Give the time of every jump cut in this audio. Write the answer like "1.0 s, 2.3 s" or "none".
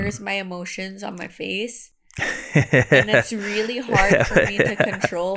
none